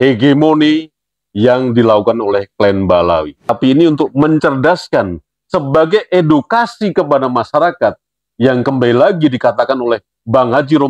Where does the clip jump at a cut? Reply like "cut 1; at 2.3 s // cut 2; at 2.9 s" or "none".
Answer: cut 1; at 3.5 s